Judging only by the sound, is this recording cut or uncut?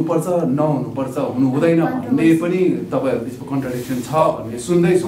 uncut